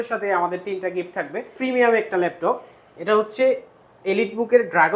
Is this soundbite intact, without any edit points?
no; 1 cut; at 1.5 s

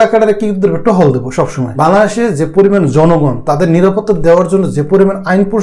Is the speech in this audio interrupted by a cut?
yes; 1 cut; at 1.6 s

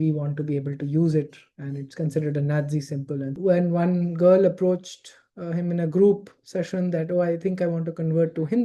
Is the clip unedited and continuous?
no; 1 cut; at 3.3 s

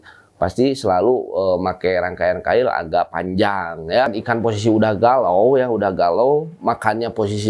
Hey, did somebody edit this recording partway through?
yes; 1 cut; at 4.2 s

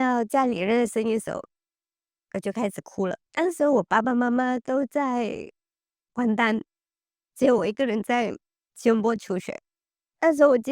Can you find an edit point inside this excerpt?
yes; 1 cut; at 3.2 s

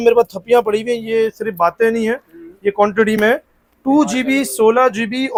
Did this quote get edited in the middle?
no; 0 cuts

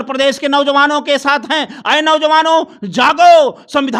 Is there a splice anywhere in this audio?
no; 0 cuts

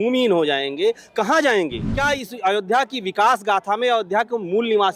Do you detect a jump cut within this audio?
yes; 1 cut; at 1.9 s

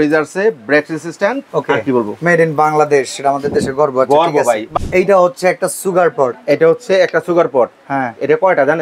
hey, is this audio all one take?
no; 2 cuts; at 1.4 s, 4.7 s

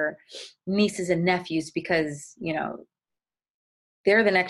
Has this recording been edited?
no; 0 cuts

